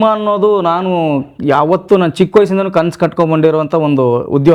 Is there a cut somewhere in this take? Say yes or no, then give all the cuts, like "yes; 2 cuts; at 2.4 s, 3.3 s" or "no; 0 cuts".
no; 0 cuts